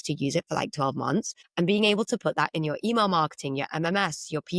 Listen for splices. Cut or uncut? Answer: cut